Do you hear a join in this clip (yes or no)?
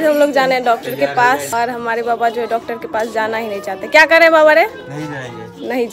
no